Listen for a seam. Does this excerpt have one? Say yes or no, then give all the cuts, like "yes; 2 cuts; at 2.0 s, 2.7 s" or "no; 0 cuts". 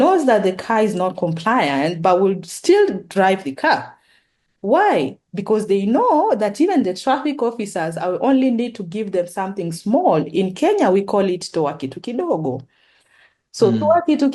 no; 0 cuts